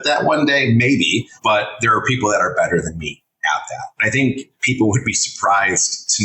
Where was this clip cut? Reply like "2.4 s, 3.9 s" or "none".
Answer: 1.3 s, 3.9 s